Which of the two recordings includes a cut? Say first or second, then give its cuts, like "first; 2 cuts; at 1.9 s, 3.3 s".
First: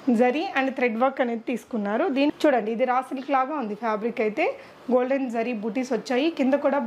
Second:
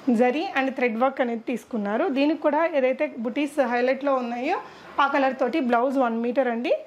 first; 1 cut; at 2.4 s